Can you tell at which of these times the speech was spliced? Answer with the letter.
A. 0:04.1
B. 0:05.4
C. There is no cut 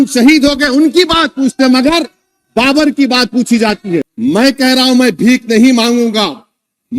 A